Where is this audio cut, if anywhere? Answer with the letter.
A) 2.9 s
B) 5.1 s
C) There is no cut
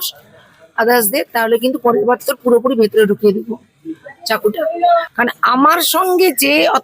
B